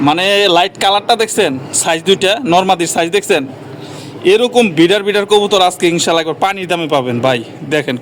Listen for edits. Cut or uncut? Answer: uncut